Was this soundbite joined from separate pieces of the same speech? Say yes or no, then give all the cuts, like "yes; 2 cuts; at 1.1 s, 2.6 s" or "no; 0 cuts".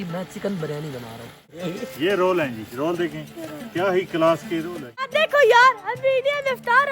yes; 2 cuts; at 1.5 s, 5.1 s